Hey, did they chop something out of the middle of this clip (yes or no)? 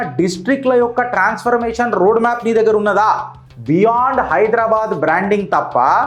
no